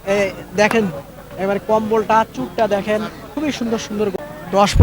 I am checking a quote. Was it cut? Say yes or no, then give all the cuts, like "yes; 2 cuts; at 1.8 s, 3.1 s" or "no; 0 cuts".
yes; 1 cut; at 3.9 s